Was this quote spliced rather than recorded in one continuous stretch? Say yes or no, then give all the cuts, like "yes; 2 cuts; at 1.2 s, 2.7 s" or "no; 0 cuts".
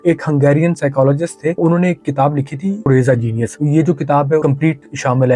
yes; 3 cuts; at 1.6 s, 3.5 s, 4.4 s